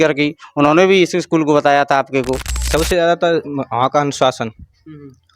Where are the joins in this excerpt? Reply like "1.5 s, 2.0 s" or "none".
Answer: 2.4 s